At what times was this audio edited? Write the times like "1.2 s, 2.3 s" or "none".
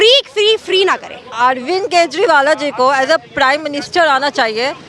1.2 s